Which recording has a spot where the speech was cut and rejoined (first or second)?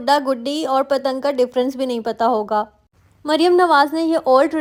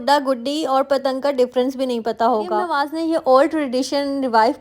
second